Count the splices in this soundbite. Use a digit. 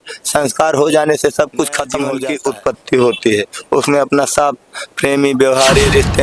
1